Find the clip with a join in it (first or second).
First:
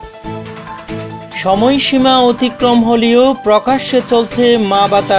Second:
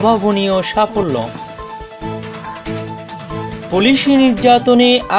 first